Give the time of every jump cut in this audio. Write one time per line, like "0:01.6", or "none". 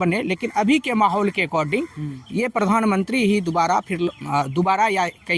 none